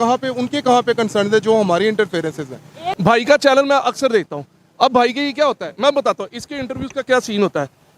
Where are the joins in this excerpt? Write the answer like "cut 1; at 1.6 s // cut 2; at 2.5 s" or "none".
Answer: cut 1; at 2.8 s